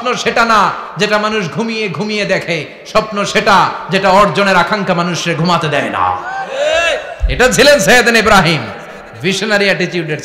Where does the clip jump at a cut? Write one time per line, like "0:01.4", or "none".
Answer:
none

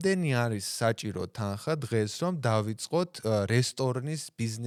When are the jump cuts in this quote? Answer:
none

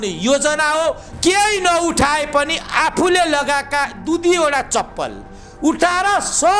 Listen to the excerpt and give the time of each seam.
0:01.1

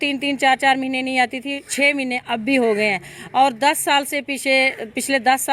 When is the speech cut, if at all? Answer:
none

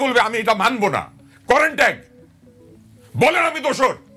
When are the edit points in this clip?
none

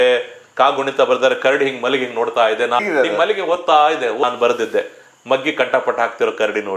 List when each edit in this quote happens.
0:02.8
0:04.2

